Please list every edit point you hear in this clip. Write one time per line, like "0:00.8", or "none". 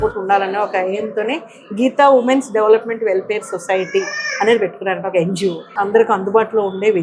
0:05.6